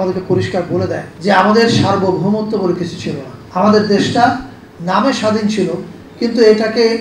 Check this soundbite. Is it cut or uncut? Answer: cut